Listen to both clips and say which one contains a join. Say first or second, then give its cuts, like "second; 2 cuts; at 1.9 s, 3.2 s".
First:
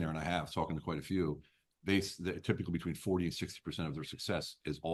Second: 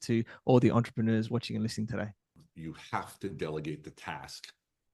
second; 1 cut; at 2.5 s